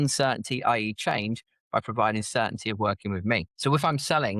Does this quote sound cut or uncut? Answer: uncut